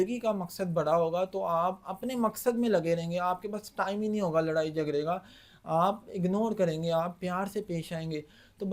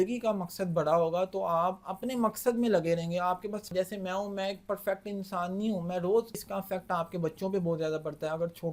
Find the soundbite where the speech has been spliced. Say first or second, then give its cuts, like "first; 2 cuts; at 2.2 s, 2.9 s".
second; 2 cuts; at 3.7 s, 6.4 s